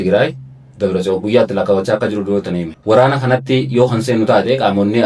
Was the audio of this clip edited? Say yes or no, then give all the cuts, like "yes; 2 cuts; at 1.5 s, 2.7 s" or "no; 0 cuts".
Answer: yes; 1 cut; at 2.7 s